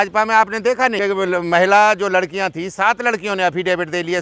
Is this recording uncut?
no; 1 cut; at 1.0 s

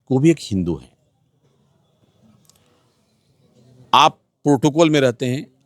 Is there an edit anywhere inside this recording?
no; 0 cuts

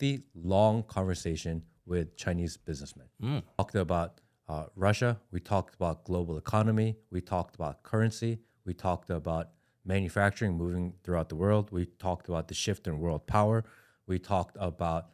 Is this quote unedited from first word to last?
no; 1 cut; at 3.6 s

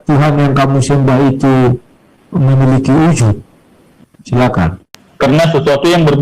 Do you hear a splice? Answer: yes; 1 cut; at 4.8 s

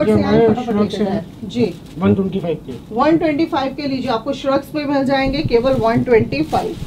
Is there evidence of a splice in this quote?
no; 0 cuts

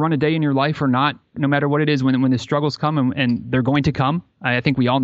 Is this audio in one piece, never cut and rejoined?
yes; 0 cuts

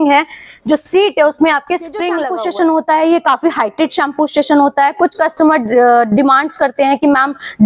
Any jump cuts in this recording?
yes; 1 cut; at 2.2 s

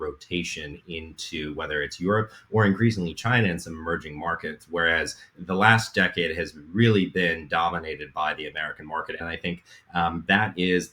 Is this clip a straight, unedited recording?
no; 1 cut; at 9.2 s

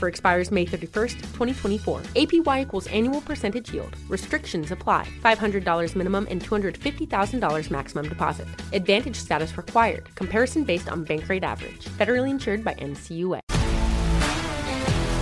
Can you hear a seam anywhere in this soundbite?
yes; 1 cut; at 13.5 s

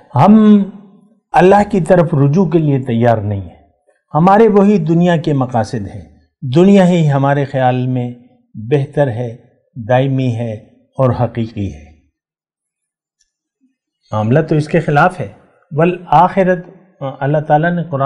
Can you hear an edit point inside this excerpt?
no; 0 cuts

